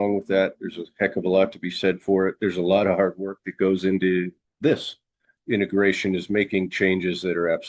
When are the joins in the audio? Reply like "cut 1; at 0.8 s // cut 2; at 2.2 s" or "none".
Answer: cut 1; at 4.4 s // cut 2; at 5.3 s